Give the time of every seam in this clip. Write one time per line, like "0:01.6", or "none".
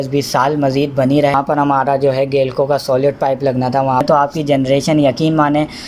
0:01.3
0:04.0